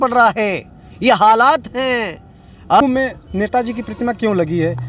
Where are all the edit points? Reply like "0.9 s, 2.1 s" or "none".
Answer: 2.8 s